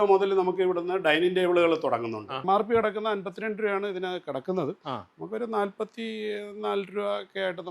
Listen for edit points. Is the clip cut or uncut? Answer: cut